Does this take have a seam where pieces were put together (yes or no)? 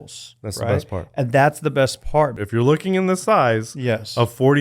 yes